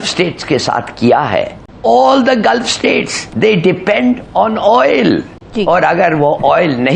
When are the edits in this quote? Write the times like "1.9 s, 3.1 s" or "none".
none